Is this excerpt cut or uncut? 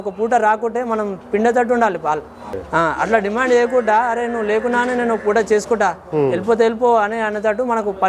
cut